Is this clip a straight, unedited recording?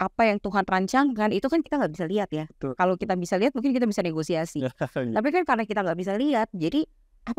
yes; 0 cuts

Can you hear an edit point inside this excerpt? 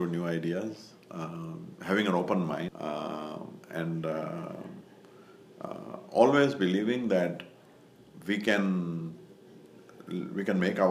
yes; 1 cut; at 2.7 s

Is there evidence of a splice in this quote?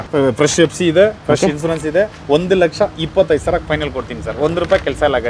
no; 0 cuts

